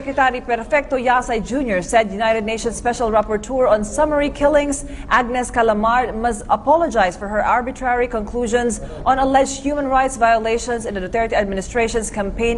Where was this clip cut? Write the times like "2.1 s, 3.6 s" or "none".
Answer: 10.0 s

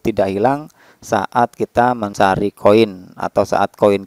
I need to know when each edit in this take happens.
2.1 s

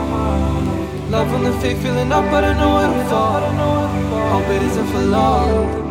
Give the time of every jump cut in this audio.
none

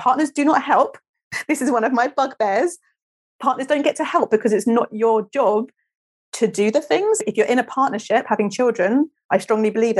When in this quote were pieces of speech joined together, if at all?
7.2 s

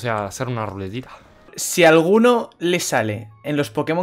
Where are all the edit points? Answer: 1.5 s

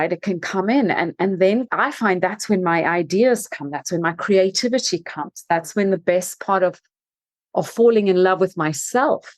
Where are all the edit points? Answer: 1.7 s

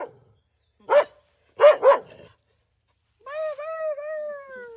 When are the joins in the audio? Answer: none

